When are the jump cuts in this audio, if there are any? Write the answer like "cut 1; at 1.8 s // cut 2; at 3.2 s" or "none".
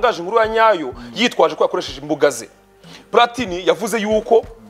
none